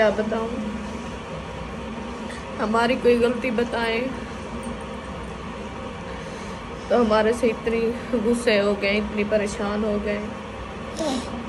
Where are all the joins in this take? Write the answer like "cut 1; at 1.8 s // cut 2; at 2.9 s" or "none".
none